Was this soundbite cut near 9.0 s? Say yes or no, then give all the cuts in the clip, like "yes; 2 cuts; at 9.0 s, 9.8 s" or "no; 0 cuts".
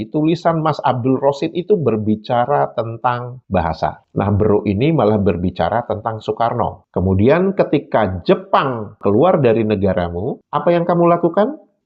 yes; 2 cuts; at 6.8 s, 9.0 s